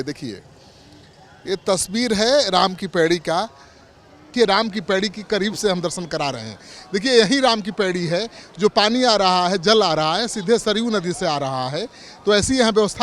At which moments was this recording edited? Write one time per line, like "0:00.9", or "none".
0:04.3